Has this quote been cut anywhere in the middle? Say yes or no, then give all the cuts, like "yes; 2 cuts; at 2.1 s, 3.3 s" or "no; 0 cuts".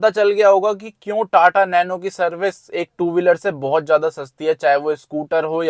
no; 0 cuts